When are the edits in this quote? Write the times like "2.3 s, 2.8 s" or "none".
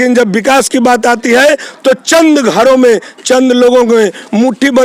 none